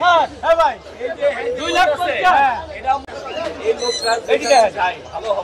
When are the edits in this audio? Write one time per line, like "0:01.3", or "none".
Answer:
none